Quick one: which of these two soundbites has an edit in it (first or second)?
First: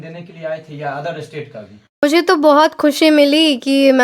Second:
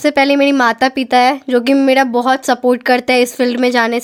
first